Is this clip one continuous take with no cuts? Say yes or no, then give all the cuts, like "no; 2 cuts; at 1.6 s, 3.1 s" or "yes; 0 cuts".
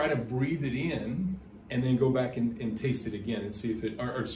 yes; 0 cuts